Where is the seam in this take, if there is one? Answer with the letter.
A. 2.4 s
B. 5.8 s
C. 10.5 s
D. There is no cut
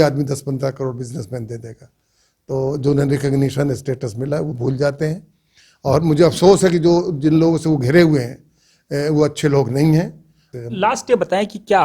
C